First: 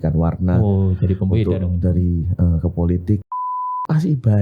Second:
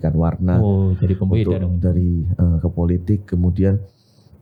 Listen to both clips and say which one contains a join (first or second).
first